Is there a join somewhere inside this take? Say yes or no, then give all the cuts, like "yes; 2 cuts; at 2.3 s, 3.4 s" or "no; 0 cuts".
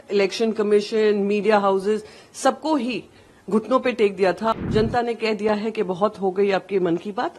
yes; 1 cut; at 4.6 s